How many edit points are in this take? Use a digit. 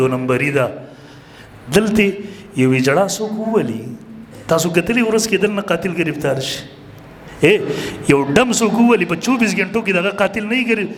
0